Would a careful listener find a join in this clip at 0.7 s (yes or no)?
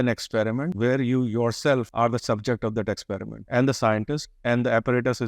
yes